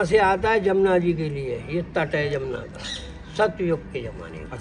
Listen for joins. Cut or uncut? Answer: uncut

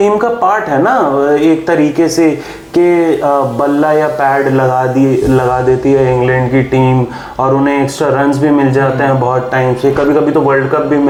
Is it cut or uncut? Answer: uncut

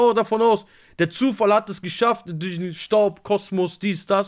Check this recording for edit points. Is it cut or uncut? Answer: uncut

